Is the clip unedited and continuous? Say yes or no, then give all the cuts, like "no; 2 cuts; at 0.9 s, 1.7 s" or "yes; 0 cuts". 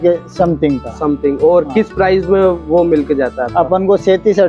yes; 0 cuts